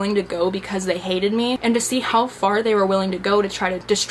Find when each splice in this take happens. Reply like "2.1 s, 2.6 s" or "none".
1.6 s